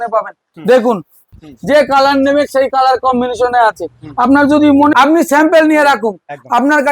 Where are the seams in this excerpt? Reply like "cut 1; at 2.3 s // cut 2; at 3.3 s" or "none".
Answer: cut 1; at 1.3 s // cut 2; at 4.9 s

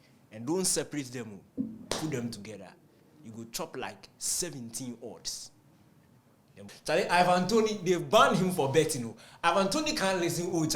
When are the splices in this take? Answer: cut 1; at 6.7 s

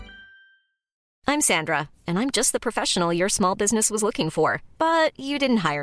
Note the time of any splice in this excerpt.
cut 1; at 0.9 s

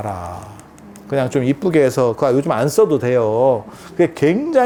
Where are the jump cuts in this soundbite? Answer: none

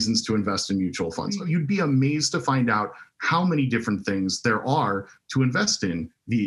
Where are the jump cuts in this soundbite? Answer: cut 1; at 1.4 s

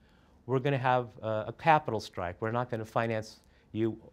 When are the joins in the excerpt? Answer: none

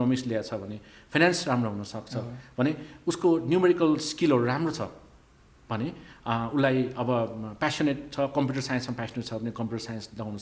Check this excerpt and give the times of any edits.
none

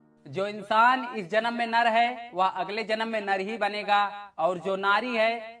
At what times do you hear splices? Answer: cut 1; at 2.8 s

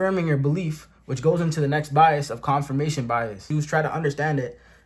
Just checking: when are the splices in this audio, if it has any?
cut 1; at 3.5 s

